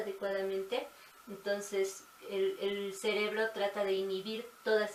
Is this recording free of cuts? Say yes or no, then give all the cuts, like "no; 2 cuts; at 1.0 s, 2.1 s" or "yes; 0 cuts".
yes; 0 cuts